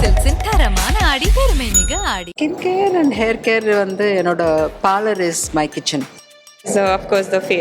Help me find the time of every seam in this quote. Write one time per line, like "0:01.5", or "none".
0:02.3
0:06.7